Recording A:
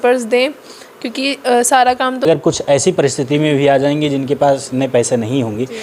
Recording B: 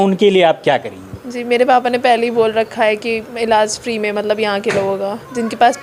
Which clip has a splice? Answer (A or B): A